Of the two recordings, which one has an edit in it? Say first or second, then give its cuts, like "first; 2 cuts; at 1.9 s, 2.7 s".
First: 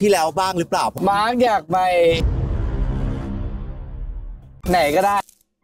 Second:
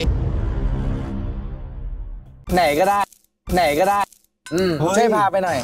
first; 1 cut; at 0.9 s